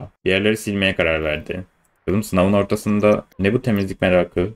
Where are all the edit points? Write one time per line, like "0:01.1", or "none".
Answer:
none